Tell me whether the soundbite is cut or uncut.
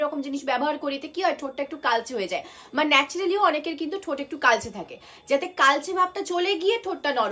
uncut